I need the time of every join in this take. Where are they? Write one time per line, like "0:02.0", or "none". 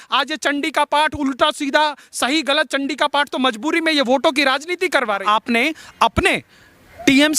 0:05.2